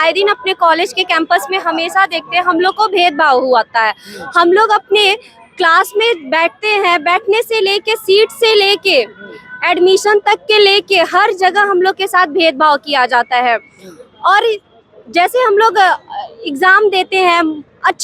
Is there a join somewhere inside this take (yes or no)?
no